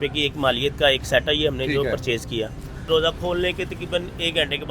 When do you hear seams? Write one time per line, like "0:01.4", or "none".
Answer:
0:02.9